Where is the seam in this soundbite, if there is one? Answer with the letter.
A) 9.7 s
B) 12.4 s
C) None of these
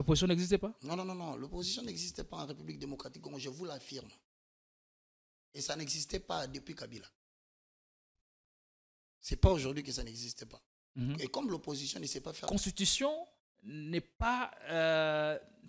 B